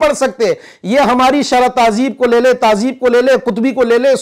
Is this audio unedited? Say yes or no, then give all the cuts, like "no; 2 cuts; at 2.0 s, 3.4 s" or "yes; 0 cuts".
yes; 0 cuts